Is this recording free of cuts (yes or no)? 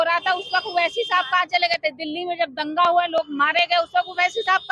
yes